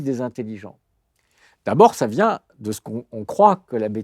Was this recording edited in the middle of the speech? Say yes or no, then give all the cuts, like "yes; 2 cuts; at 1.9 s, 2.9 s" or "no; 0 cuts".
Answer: no; 0 cuts